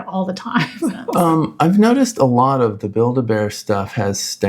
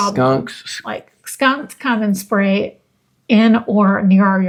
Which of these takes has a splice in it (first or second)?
first